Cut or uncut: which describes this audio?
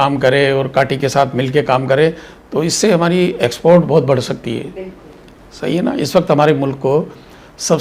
uncut